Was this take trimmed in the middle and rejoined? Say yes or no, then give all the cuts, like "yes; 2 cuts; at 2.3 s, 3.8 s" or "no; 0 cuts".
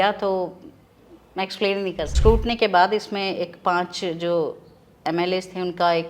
yes; 1 cut; at 2.1 s